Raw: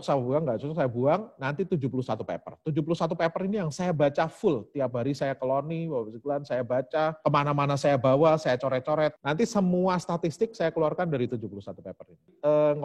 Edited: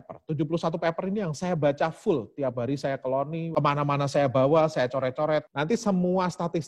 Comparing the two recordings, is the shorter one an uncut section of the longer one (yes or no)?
no